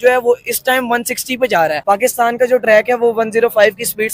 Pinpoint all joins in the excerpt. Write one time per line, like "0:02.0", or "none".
0:01.8